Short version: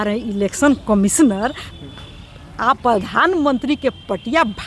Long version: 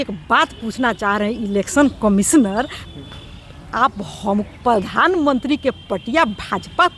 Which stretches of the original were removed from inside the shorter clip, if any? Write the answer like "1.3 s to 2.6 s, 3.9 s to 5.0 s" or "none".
3.9 s to 4.6 s